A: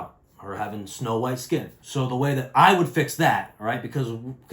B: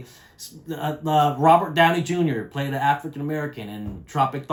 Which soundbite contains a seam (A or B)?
A